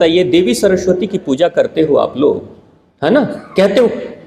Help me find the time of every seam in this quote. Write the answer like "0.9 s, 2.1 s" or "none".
none